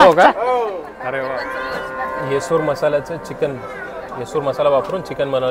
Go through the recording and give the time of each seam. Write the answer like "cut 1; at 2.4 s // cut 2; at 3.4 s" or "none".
cut 1; at 1.2 s

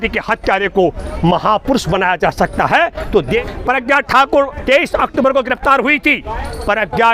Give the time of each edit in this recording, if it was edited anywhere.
cut 1; at 3.3 s

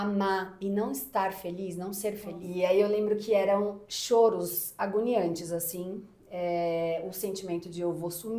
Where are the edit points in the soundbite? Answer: cut 1; at 2.3 s

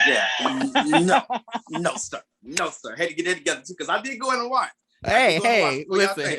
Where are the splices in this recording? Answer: cut 1; at 4.9 s

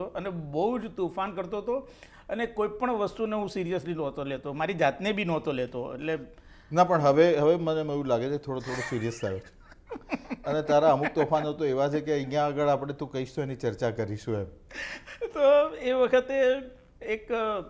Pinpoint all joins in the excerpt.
none

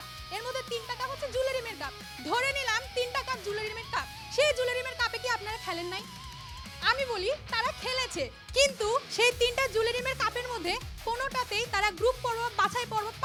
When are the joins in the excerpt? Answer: none

